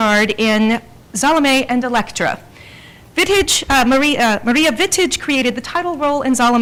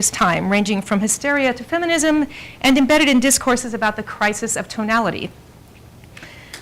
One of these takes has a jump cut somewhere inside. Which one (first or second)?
second